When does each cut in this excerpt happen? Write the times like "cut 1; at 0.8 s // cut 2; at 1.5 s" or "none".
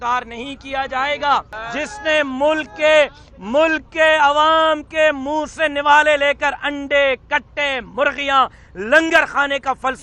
cut 1; at 1.6 s